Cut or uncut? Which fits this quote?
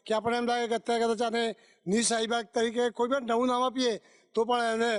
uncut